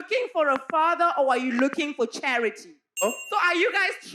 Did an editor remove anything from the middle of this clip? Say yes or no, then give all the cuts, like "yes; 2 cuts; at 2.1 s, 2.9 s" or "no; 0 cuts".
yes; 1 cut; at 3.0 s